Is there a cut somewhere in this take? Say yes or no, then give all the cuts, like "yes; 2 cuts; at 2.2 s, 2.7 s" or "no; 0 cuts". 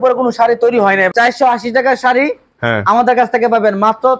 yes; 1 cut; at 1.1 s